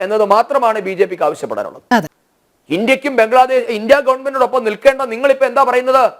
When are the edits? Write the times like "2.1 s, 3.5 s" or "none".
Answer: 2.2 s